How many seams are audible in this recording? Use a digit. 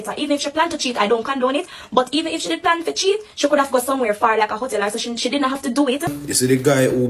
1